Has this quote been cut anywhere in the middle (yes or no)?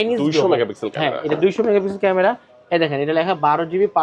no